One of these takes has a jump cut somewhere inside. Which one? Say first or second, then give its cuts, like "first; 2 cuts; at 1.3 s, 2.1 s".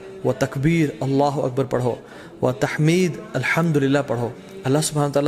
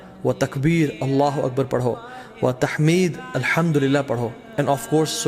first; 1 cut; at 4.4 s